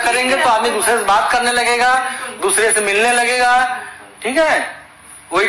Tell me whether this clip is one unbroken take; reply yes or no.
yes